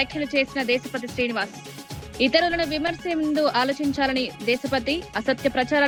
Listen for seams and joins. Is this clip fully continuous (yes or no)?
yes